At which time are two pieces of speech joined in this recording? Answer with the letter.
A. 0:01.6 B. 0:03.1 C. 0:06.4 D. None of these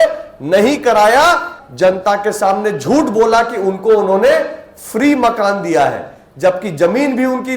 A